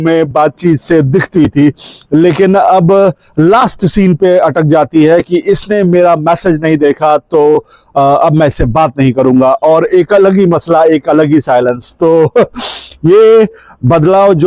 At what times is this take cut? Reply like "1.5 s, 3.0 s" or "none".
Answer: none